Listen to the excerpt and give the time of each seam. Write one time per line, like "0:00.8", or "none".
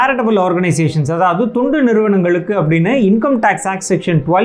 none